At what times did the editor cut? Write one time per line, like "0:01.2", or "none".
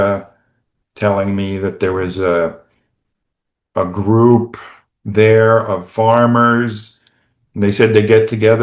none